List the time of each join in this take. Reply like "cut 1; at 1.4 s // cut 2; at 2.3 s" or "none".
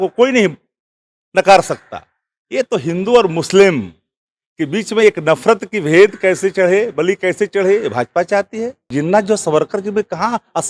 cut 1; at 8.9 s